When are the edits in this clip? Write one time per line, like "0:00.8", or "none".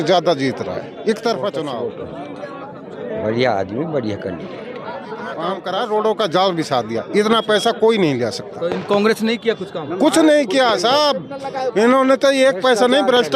0:01.7
0:05.6